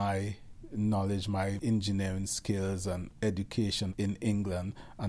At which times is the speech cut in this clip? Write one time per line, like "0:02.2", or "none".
0:01.6
0:03.1
0:03.9